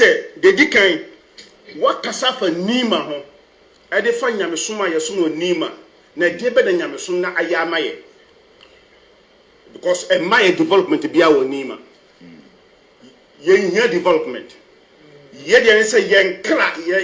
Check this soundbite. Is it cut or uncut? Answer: uncut